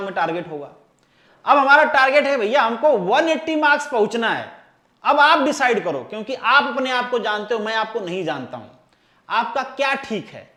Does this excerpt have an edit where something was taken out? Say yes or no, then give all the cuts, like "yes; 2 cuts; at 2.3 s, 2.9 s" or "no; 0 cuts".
no; 0 cuts